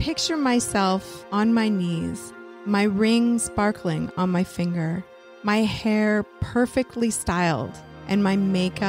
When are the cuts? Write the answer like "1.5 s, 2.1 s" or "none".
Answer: none